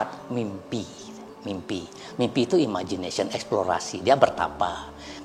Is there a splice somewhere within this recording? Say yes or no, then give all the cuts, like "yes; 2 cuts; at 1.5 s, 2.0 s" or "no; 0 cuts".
no; 0 cuts